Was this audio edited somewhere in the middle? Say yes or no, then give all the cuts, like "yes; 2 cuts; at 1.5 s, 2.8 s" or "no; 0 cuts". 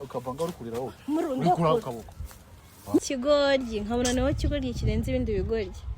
yes; 1 cut; at 3.1 s